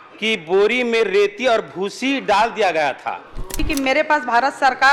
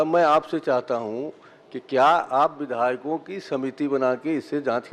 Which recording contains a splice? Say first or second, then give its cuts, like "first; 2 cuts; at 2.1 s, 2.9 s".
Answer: first; 1 cut; at 3.6 s